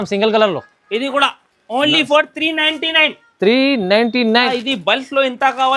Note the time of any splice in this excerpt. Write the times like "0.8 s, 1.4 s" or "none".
4.5 s